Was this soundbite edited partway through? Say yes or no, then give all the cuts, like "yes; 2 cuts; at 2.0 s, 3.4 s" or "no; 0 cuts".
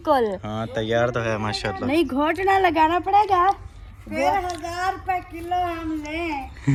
no; 0 cuts